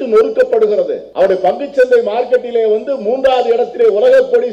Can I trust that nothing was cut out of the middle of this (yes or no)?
no